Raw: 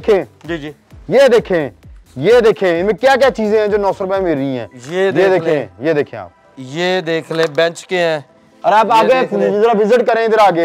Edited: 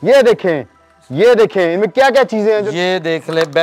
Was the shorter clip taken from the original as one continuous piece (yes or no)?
no